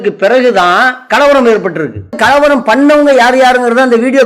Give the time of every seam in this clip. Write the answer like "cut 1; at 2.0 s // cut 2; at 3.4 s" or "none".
cut 1; at 2.2 s